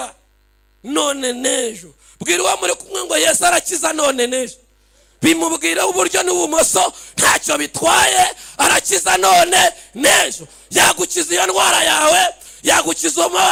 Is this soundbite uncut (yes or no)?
yes